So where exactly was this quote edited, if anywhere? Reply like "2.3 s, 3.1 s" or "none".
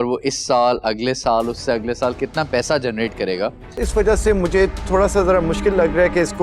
3.9 s